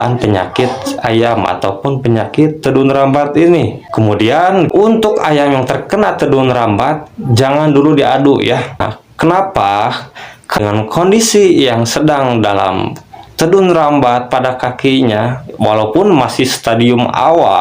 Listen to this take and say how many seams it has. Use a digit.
2